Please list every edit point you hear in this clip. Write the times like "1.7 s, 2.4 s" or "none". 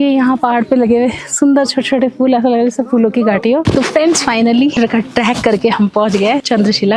3.7 s